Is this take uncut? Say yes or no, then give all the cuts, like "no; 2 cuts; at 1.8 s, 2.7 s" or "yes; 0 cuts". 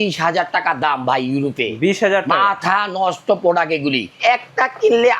no; 1 cut; at 4.2 s